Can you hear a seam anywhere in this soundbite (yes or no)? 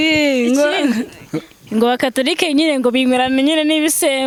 no